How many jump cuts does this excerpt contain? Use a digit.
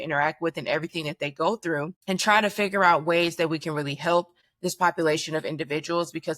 2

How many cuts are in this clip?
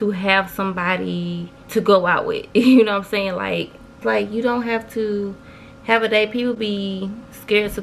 0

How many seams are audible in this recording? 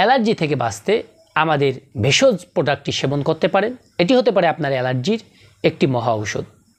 2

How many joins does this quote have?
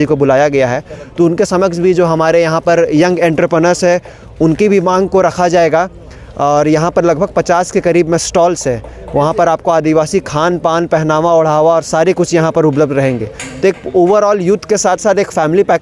0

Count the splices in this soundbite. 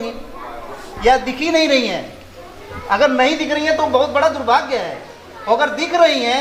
0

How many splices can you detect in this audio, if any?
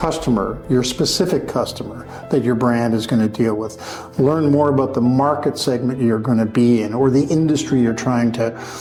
0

